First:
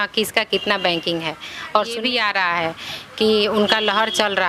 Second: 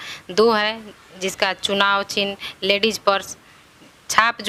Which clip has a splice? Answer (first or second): first